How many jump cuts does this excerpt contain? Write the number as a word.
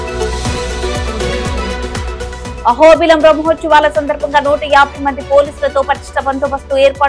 one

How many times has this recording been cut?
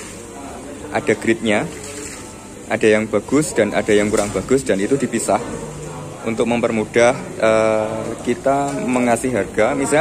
zero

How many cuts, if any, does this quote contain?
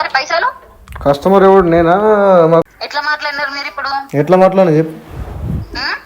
one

